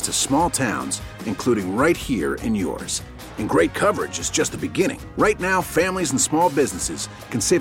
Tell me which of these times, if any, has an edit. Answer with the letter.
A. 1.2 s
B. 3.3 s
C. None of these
C